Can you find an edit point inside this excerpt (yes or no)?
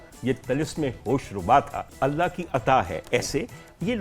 yes